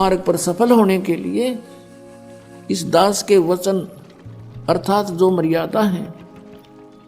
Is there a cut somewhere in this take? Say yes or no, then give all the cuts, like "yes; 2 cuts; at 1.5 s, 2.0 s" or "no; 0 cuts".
no; 0 cuts